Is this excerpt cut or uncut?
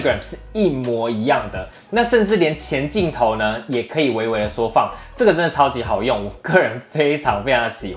uncut